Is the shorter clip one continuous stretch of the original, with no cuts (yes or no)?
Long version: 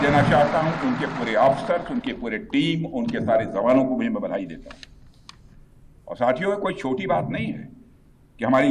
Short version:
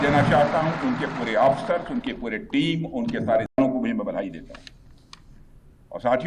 no